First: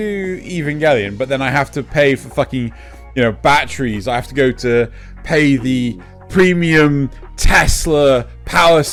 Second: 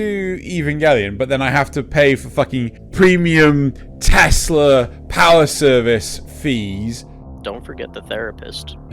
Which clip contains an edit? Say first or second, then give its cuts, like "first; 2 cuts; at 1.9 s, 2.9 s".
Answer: second; 1 cut; at 2.8 s